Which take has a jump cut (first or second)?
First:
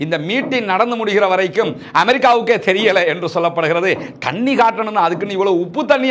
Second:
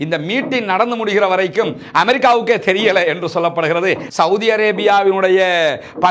second